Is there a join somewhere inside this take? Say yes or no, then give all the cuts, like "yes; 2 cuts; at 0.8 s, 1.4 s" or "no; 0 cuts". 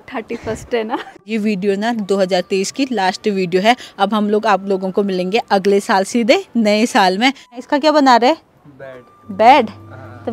yes; 2 cuts; at 1.2 s, 7.5 s